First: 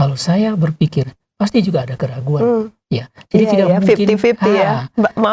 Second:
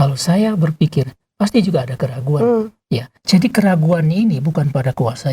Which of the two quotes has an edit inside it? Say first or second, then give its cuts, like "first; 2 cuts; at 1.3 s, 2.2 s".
second; 1 cut; at 3.1 s